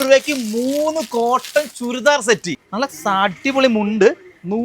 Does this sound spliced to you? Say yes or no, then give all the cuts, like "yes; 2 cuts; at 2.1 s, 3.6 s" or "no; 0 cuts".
yes; 1 cut; at 2.4 s